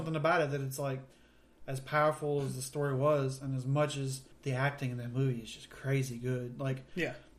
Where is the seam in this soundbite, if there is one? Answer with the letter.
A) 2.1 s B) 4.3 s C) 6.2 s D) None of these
B